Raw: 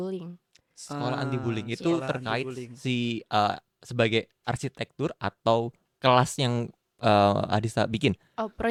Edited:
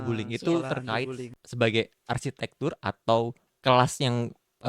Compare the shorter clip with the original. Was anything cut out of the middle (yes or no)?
yes